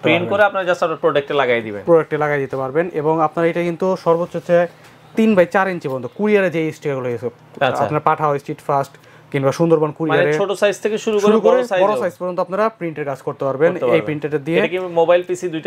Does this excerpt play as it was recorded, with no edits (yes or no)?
yes